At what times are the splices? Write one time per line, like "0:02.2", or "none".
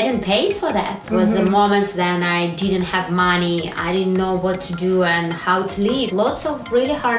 0:01.0
0:06.1